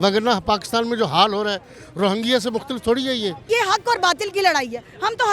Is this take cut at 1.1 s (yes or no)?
no